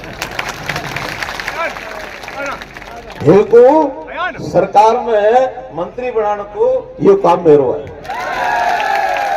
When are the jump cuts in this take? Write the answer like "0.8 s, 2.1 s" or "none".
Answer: 1.5 s